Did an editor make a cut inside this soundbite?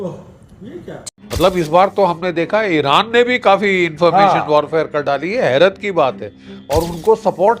yes; 1 cut; at 1.1 s

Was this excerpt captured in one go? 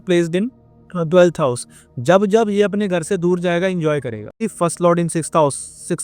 no; 1 cut; at 4.4 s

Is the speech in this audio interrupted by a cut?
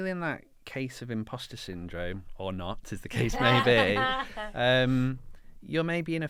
no; 0 cuts

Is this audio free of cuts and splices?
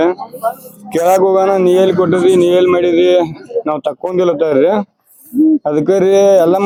yes; 0 cuts

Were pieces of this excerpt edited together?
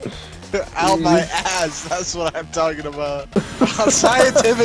yes; 1 cut; at 3.3 s

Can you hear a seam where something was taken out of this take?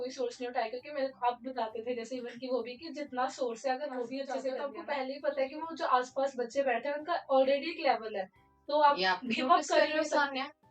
yes; 1 cut; at 4.5 s

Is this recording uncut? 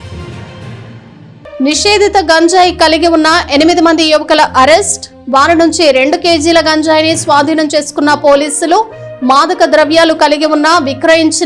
no; 1 cut; at 1.0 s

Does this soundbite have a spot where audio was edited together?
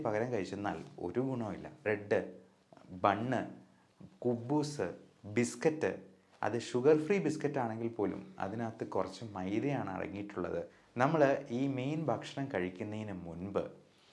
yes; 2 cuts; at 1.9 s, 10.7 s

